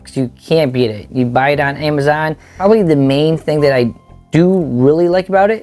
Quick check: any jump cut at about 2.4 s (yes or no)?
yes